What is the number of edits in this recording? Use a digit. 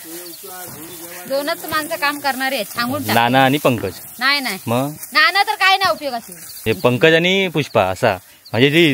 1